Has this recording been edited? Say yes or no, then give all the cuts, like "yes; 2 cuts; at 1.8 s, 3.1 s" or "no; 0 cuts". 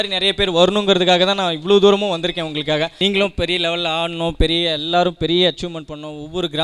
yes; 1 cut; at 2.9 s